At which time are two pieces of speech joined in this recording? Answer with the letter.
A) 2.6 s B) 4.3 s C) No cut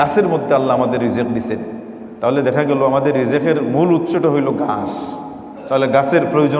C